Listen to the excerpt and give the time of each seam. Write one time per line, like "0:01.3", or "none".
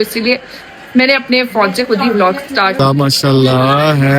0:02.8